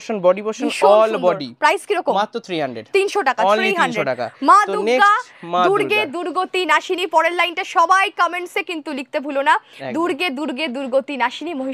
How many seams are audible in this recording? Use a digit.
0